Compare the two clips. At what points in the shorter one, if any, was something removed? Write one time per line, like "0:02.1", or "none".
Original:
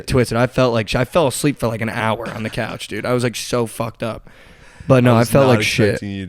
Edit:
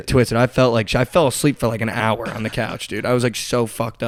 none